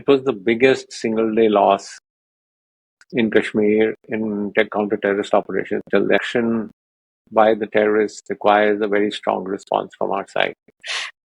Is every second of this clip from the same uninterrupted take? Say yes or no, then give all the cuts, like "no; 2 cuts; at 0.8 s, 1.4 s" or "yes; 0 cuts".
no; 1 cut; at 6.3 s